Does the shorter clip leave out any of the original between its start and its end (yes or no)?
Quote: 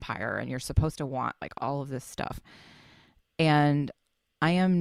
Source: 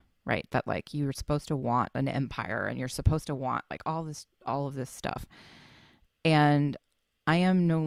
yes